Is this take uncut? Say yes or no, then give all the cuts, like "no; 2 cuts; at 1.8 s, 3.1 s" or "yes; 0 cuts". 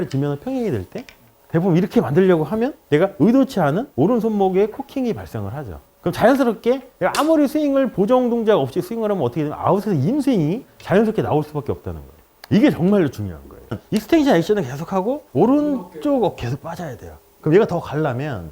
no; 1 cut; at 13.8 s